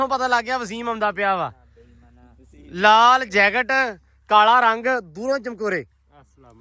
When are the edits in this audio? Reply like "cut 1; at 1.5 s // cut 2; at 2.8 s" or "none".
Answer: none